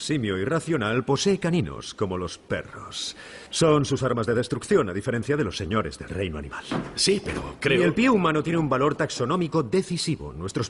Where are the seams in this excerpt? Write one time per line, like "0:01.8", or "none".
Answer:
0:06.9